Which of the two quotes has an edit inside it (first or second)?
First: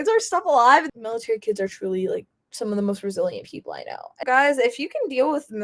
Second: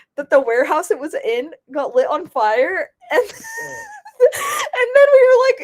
first